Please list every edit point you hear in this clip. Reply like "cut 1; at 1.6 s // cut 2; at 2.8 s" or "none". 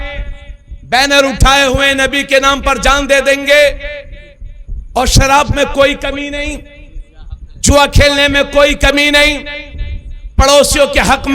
none